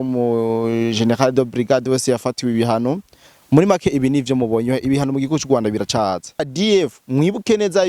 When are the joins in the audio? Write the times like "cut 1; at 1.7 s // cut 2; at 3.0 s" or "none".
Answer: cut 1; at 6.5 s